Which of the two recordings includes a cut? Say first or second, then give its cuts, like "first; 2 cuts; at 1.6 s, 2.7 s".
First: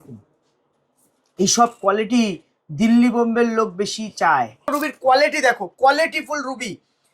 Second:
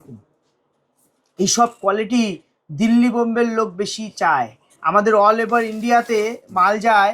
first; 1 cut; at 4.7 s